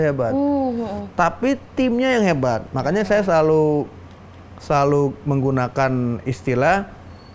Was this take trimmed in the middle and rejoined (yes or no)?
no